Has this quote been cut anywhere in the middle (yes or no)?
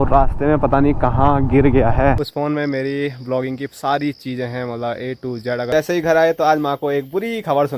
yes